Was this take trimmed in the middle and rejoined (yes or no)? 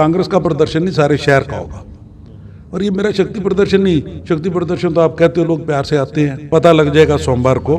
yes